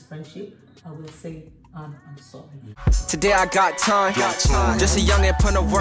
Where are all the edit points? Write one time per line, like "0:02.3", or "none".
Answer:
0:02.7